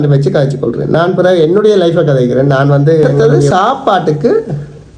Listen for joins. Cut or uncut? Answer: cut